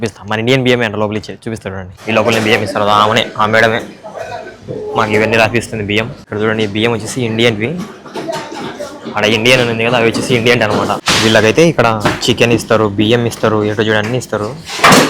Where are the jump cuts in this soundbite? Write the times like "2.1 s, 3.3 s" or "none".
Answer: 1.9 s, 6.2 s, 11.1 s